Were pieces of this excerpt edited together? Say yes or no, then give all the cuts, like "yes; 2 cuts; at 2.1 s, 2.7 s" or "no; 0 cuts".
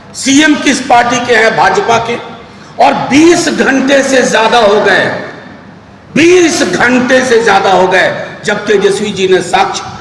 no; 0 cuts